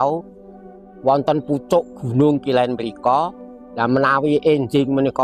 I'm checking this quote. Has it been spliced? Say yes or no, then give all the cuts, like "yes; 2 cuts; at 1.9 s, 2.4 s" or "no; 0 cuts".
no; 0 cuts